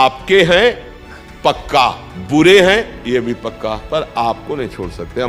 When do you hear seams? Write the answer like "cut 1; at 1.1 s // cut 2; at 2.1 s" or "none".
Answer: cut 1; at 2.1 s // cut 2; at 3.8 s